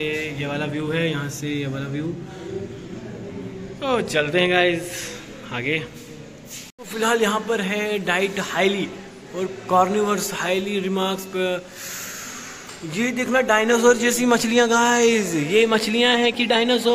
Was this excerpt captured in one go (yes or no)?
yes